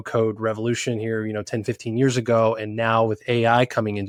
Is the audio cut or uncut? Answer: uncut